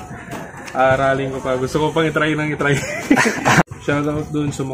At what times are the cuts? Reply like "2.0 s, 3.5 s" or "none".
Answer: 3.6 s